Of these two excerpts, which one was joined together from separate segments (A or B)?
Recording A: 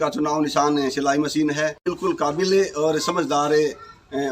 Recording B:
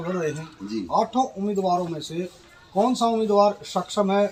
A